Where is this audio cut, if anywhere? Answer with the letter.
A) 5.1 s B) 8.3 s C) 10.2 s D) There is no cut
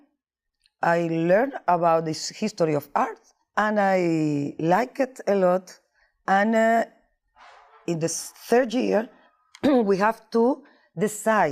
A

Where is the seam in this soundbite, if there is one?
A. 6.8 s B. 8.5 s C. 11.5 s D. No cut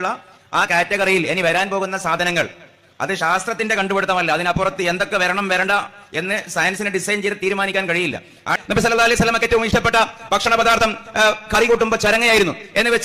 B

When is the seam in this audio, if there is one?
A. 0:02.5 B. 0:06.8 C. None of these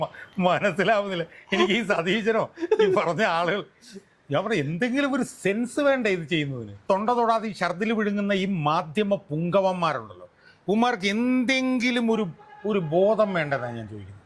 B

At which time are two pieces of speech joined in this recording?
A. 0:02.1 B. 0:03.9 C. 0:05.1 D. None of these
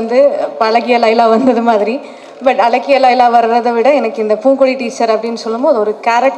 D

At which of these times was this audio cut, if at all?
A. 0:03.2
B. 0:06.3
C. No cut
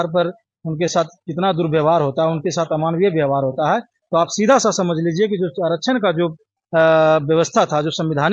C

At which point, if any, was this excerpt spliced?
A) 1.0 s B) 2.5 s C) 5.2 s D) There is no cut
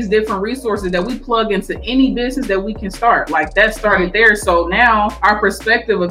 C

